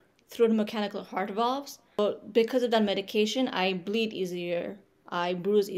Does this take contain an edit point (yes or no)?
yes